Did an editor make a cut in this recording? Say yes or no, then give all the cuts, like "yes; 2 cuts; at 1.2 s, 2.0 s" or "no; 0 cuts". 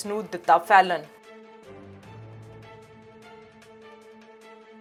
no; 0 cuts